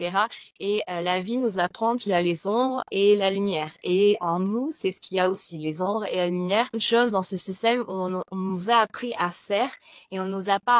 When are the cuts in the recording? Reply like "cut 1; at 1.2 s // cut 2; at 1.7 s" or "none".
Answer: cut 1; at 6.8 s